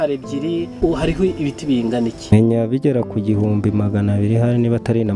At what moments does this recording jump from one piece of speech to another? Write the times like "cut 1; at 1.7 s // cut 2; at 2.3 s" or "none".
cut 1; at 0.8 s // cut 2; at 2.3 s